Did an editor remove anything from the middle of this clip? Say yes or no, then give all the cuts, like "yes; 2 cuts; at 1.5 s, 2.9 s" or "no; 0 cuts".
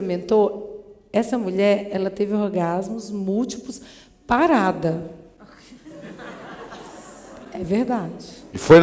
no; 0 cuts